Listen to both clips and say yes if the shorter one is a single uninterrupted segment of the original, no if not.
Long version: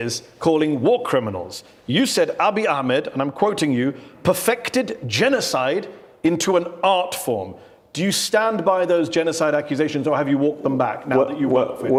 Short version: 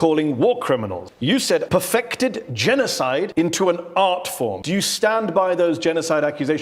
no